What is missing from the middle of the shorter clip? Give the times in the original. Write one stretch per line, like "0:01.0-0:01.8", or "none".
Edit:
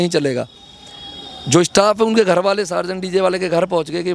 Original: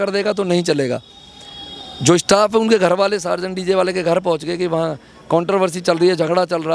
none